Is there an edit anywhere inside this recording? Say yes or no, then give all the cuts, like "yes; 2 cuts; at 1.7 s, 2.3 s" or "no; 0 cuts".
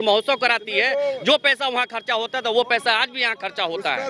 no; 0 cuts